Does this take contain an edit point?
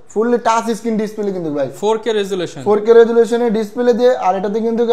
no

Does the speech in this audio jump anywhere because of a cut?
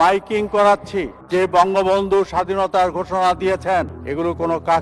yes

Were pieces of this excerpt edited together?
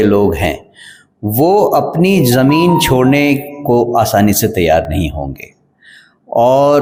no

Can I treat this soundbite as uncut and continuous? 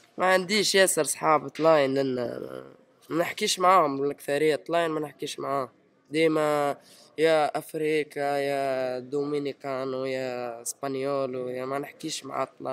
yes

